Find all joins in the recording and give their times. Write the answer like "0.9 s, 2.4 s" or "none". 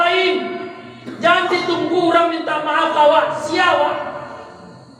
none